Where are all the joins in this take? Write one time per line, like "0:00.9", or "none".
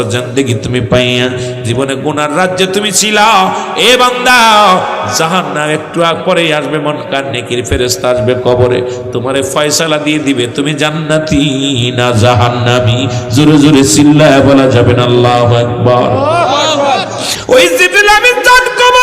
0:17.3